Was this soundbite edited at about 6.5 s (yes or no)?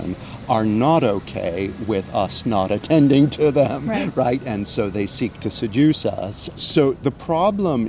yes